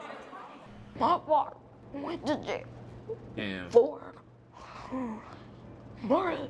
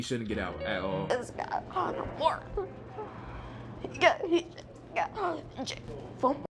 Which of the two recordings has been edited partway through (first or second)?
second